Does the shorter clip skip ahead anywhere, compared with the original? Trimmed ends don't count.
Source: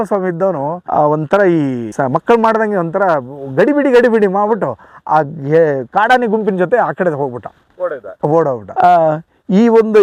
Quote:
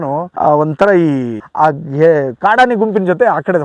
yes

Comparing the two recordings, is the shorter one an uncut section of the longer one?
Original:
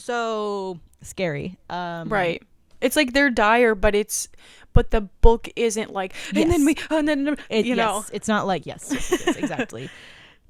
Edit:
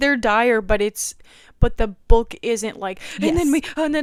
yes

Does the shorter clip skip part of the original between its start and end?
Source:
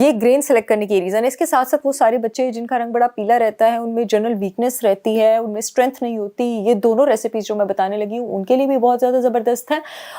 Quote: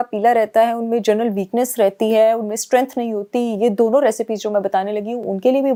no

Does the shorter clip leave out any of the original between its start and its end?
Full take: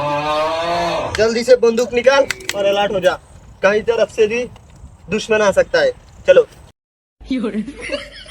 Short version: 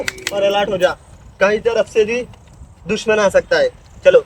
no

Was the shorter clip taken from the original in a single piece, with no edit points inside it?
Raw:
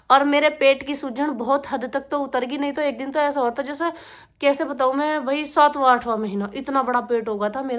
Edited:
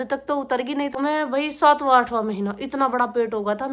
no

